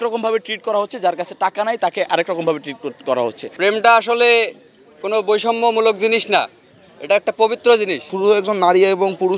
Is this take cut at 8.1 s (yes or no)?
yes